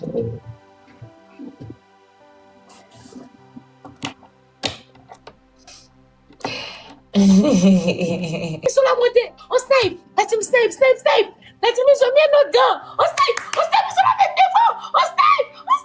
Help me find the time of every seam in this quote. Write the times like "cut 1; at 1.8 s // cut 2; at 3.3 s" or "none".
cut 1; at 8.6 s